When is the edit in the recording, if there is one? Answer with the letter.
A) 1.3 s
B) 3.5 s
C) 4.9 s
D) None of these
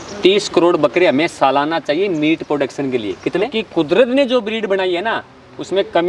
B